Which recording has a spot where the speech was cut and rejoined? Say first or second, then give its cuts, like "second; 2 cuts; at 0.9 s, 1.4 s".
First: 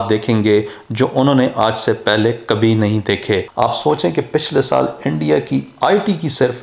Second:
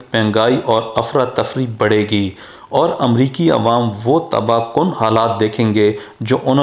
first; 1 cut; at 3.5 s